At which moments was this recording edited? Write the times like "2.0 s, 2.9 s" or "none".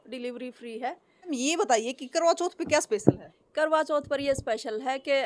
1.3 s